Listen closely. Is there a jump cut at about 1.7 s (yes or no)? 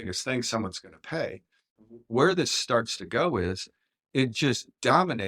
yes